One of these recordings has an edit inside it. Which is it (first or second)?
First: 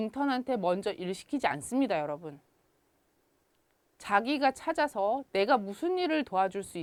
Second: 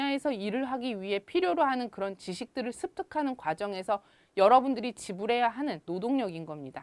second